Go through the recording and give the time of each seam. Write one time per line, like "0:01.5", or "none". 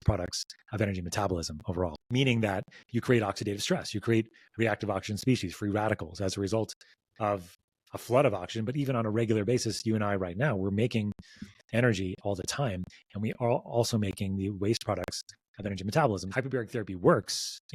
0:02.0
0:16.3